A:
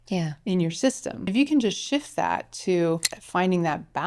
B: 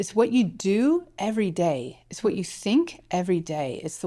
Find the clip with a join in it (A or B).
A